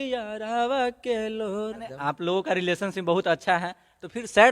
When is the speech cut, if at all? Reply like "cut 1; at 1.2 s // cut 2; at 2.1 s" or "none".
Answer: cut 1; at 1.9 s